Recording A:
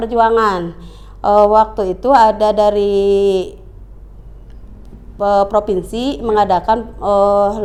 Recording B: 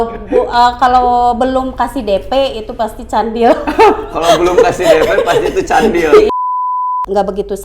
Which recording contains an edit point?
B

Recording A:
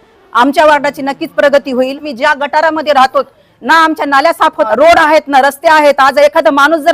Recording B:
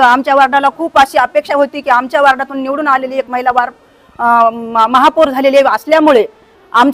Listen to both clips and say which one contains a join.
A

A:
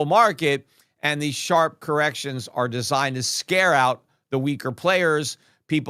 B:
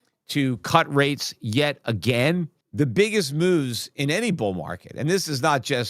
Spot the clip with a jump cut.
B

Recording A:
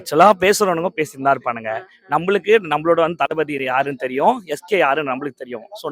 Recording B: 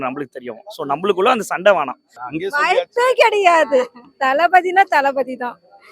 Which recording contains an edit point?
B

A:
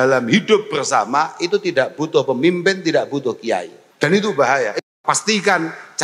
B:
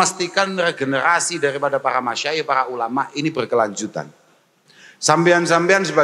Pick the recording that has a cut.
A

